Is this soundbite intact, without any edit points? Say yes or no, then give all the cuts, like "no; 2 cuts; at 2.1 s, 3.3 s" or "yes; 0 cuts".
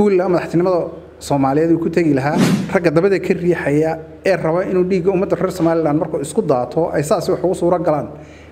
no; 1 cut; at 2.5 s